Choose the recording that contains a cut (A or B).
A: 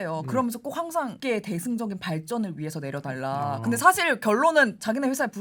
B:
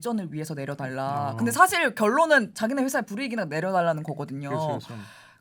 A